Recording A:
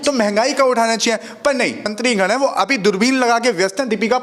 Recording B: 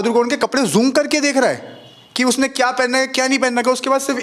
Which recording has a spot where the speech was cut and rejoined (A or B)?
A